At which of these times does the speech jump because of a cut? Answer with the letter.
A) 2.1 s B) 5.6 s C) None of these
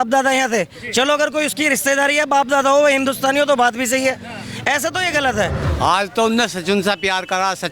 B